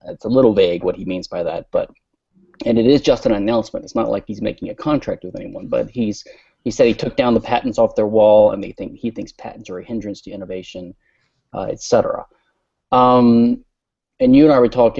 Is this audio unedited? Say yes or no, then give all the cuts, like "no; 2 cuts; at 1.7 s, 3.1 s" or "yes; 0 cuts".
no; 1 cut; at 11.8 s